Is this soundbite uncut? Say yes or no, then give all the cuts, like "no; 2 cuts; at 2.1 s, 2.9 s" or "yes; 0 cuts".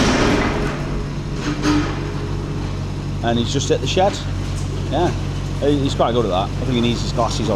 yes; 0 cuts